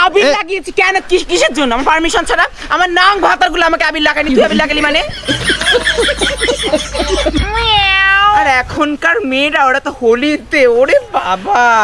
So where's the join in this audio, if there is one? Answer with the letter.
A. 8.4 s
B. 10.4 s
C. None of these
A